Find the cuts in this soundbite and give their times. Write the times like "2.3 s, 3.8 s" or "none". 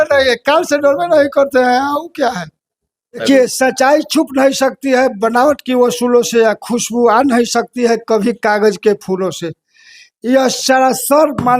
3.2 s